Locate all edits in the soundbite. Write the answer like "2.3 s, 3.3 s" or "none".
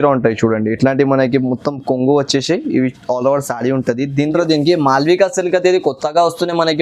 4.3 s